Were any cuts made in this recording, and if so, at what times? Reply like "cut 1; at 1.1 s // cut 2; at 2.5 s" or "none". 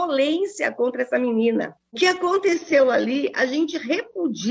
none